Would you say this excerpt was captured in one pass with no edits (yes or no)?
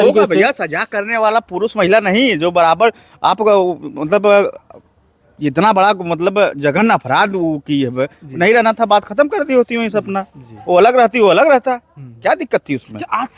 yes